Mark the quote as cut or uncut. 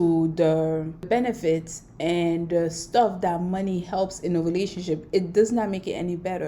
cut